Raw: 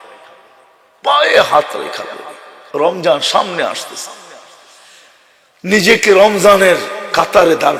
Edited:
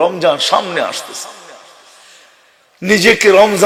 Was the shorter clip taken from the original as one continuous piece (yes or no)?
yes